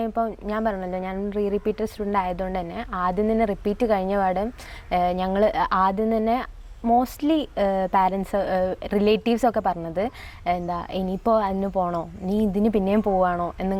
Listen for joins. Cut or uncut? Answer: uncut